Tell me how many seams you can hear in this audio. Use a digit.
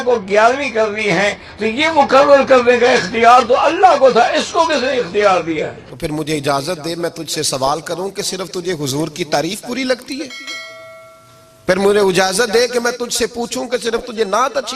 1